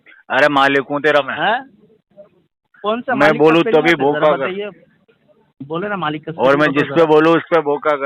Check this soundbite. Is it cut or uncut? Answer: uncut